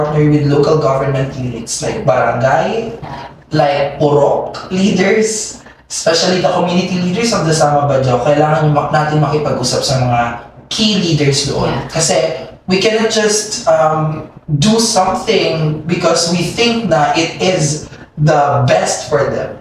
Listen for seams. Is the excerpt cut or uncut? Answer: uncut